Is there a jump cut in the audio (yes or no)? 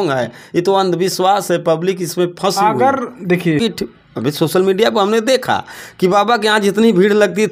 yes